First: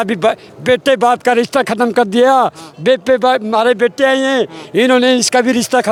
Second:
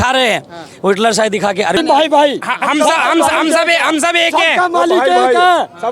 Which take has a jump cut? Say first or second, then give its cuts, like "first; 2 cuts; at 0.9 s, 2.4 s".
second; 1 cut; at 1.8 s